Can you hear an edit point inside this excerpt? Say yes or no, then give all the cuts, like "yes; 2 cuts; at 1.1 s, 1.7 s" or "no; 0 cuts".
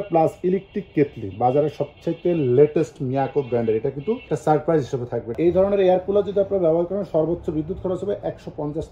yes; 1 cut; at 5.3 s